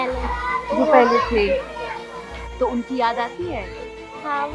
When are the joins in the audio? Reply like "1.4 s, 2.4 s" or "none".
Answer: none